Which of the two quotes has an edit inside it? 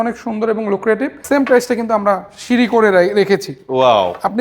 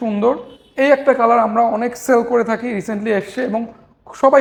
first; 1 cut; at 1.2 s

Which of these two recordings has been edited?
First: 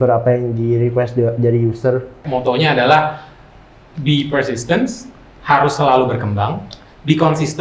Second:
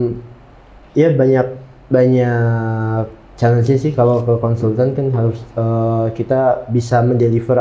first; 1 cut; at 2.2 s

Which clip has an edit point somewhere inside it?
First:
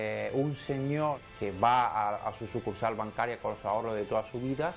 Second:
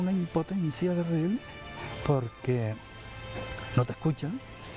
first; 1 cut; at 1.2 s

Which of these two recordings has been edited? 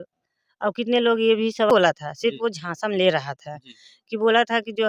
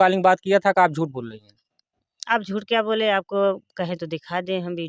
first; 1 cut; at 1.7 s

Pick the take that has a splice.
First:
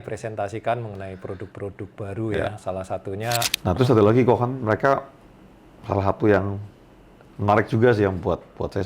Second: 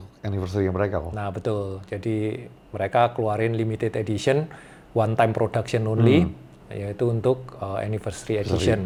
first; 1 cut; at 3.5 s

